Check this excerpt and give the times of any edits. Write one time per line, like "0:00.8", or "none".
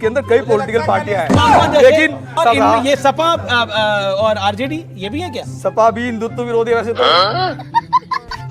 0:02.3